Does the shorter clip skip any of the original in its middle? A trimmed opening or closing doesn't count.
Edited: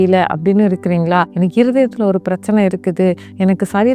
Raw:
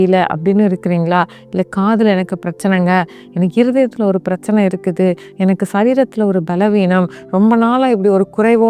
yes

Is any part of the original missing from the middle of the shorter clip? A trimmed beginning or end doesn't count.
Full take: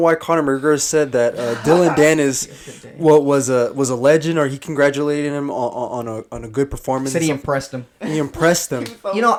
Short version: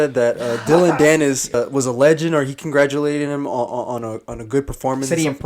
yes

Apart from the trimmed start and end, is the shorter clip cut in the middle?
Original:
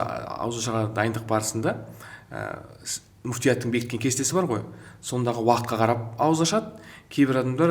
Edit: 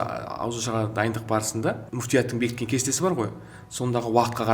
yes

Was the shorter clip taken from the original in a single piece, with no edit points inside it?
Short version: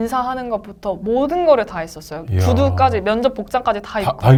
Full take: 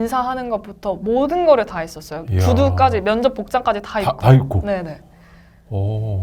yes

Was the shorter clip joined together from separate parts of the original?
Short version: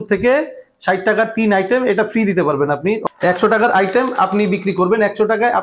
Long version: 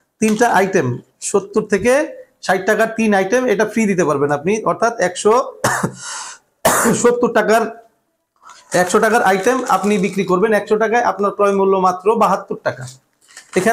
yes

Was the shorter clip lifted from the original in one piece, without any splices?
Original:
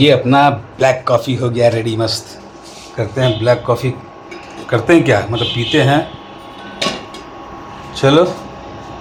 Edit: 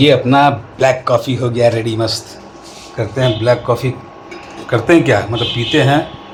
yes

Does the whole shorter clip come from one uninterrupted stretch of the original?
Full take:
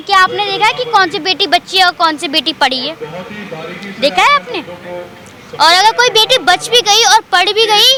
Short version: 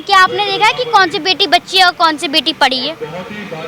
yes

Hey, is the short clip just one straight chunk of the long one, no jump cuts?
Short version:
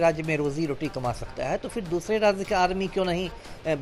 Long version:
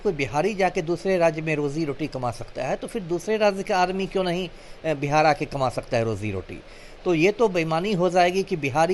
yes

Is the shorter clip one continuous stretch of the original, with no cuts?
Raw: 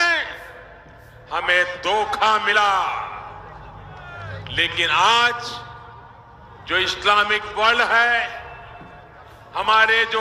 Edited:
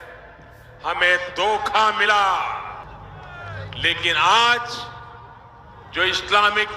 no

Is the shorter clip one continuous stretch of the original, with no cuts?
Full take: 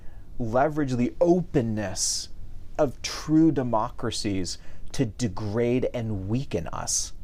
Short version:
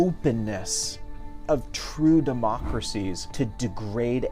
no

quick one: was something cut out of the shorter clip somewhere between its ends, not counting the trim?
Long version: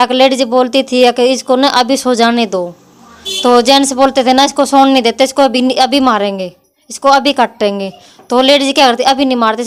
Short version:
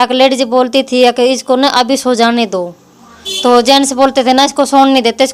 no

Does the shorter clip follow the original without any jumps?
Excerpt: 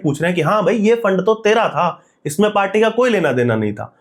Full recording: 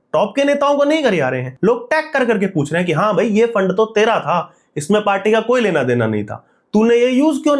yes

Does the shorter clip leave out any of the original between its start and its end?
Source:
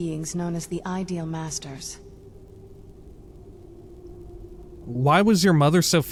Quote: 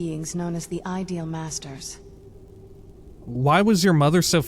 yes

